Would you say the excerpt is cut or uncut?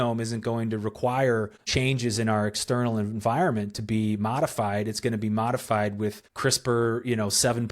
cut